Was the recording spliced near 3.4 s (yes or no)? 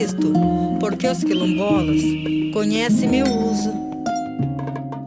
no